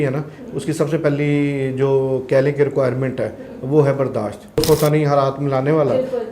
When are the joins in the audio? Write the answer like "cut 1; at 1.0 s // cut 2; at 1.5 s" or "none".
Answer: cut 1; at 4.4 s